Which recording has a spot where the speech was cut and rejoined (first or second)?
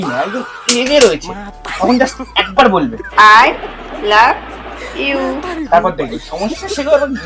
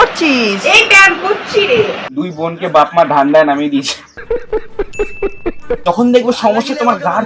second